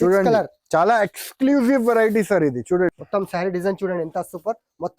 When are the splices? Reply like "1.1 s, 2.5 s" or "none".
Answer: 3.0 s